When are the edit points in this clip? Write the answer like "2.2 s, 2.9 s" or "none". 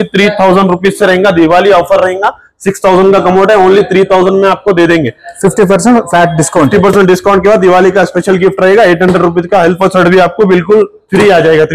none